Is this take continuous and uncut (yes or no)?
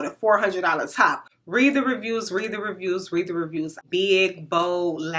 no